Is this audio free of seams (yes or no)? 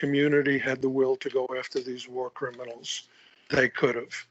no